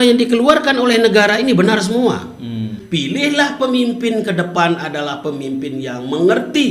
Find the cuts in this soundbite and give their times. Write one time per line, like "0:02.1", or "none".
0:02.8